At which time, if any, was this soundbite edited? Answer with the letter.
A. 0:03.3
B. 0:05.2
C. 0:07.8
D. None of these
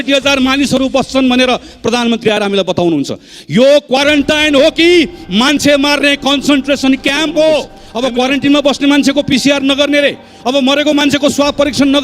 C